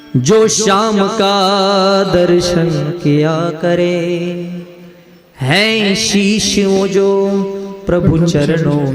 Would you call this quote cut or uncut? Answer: uncut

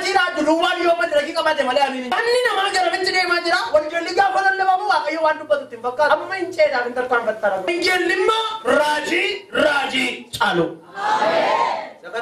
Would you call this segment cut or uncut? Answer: uncut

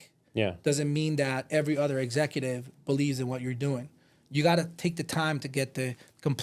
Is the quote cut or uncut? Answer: uncut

